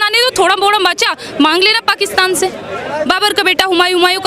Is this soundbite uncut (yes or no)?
no